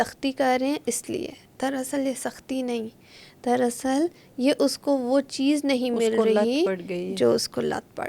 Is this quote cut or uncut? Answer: uncut